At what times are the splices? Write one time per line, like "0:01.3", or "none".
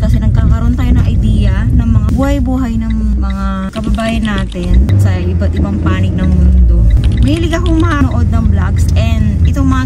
none